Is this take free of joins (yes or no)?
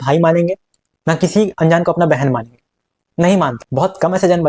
yes